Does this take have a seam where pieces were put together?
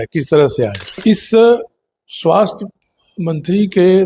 yes; 1 cut; at 1.0 s

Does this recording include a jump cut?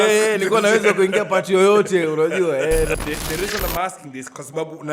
yes; 1 cut; at 2.9 s

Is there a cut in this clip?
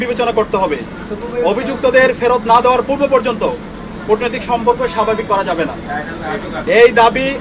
no; 0 cuts

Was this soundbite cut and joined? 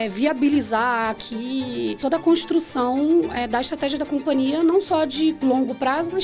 yes; 1 cut; at 2.0 s

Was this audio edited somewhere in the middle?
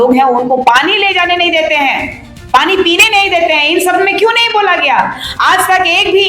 no; 0 cuts

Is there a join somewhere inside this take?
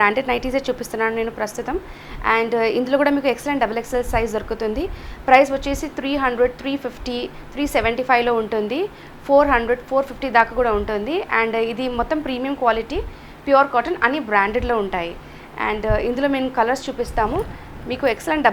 no; 0 cuts

